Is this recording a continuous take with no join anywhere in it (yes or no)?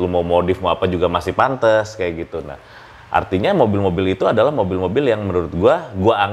yes